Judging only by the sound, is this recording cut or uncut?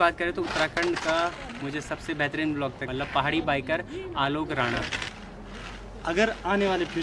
cut